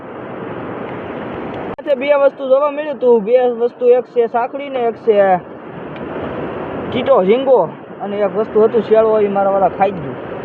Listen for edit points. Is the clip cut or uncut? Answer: cut